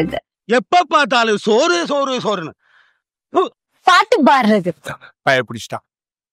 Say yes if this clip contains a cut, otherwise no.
no